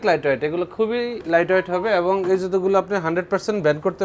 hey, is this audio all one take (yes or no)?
no